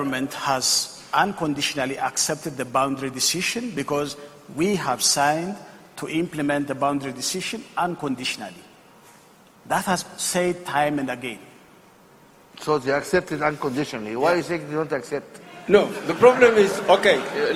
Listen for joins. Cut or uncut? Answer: uncut